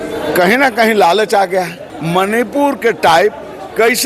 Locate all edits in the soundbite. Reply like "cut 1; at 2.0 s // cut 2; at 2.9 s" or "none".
cut 1; at 1.9 s